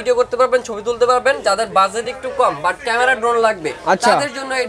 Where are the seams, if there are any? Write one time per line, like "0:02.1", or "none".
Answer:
none